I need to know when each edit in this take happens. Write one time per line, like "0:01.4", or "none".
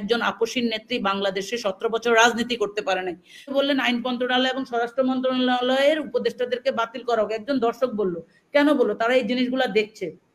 0:03.5

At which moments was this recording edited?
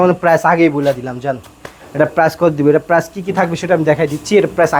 none

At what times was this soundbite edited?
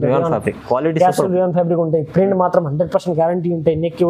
none

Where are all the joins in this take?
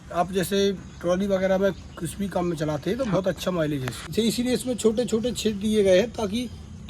0:04.1

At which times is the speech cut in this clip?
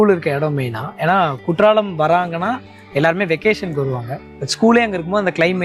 none

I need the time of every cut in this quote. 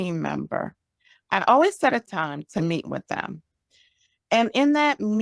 0:02.1

